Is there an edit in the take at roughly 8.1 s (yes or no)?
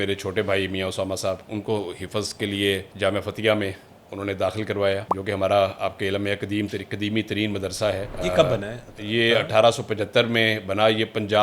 yes